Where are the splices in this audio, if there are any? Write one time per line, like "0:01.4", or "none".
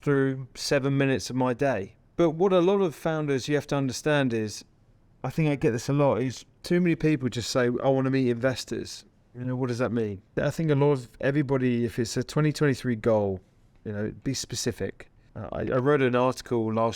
none